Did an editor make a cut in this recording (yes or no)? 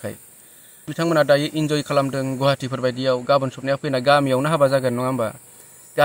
yes